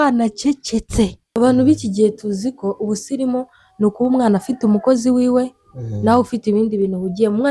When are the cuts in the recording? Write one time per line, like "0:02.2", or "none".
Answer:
0:01.2